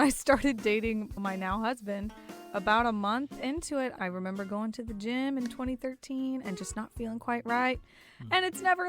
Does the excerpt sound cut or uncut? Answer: cut